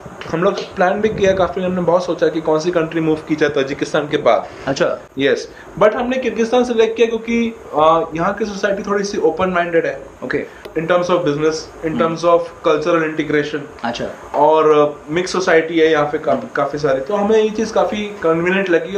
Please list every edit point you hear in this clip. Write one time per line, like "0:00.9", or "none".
none